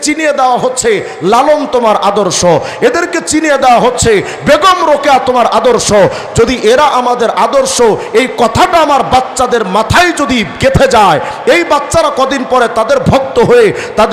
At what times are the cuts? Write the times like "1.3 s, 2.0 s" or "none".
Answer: none